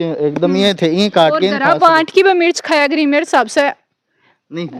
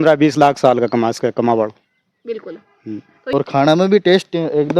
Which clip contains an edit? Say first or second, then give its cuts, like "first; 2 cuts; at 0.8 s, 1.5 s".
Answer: second; 1 cut; at 3.3 s